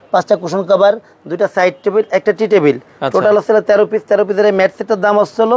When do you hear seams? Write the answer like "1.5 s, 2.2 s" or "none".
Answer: none